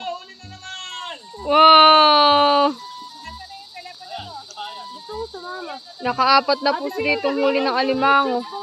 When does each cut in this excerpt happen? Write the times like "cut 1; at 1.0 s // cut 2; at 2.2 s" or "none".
none